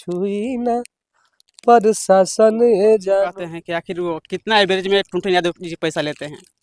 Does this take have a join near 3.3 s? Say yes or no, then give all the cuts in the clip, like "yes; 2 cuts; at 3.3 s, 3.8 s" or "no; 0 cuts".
yes; 1 cut; at 3.3 s